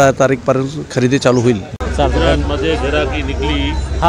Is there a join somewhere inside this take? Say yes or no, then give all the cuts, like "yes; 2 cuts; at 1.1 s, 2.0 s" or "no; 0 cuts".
yes; 1 cut; at 1.8 s